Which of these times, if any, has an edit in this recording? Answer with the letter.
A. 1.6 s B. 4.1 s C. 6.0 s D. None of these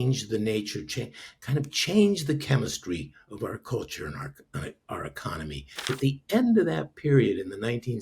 C